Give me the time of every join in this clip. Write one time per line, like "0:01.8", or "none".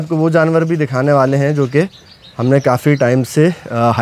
none